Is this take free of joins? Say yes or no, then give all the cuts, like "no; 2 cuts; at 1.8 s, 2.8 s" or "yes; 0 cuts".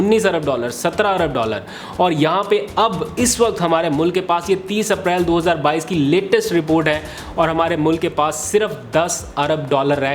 yes; 0 cuts